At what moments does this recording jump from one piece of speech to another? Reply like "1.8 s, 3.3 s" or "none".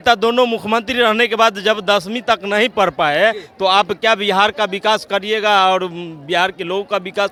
none